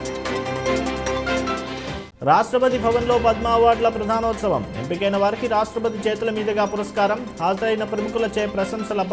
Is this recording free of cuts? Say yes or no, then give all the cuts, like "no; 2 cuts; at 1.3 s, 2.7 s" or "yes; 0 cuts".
yes; 0 cuts